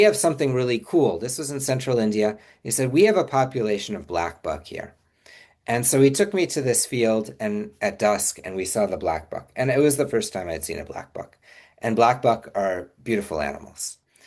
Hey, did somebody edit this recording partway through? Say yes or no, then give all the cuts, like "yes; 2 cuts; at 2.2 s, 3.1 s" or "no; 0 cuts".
no; 0 cuts